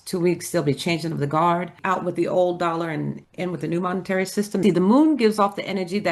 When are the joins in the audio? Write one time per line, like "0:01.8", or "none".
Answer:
0:01.8
0:04.6